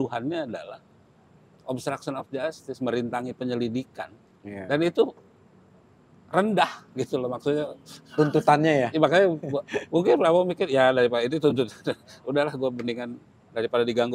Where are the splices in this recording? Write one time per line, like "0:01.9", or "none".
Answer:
none